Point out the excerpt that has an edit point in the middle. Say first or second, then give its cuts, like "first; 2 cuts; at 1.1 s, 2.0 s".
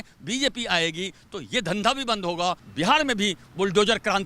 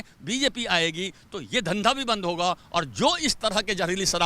first; 1 cut; at 2.6 s